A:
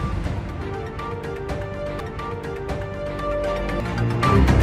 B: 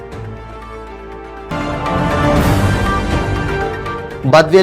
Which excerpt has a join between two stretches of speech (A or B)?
B